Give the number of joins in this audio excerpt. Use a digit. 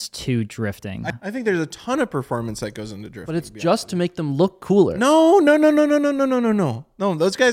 1